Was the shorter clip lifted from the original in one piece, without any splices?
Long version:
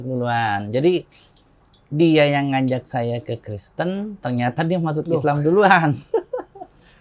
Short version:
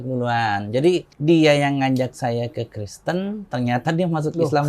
no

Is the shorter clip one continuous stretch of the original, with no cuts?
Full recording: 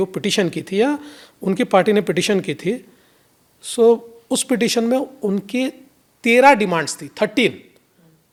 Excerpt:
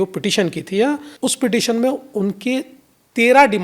no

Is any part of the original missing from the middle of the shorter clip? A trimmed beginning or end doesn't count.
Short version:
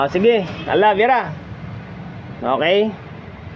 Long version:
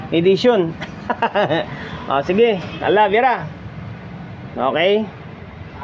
no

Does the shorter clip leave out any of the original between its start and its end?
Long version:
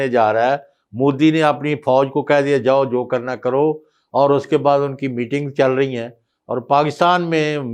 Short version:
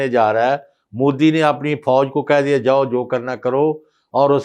no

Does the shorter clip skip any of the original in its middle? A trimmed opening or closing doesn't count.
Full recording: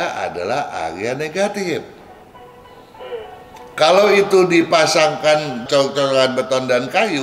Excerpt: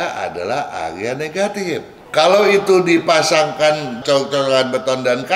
yes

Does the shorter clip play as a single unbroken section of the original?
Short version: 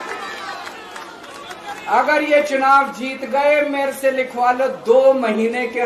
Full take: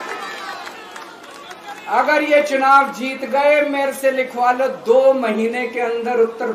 yes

